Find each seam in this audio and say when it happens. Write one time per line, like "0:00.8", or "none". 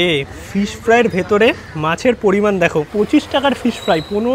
0:02.9